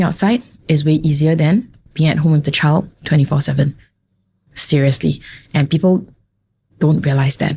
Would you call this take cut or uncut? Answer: uncut